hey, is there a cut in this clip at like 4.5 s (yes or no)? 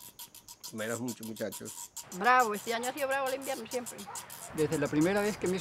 yes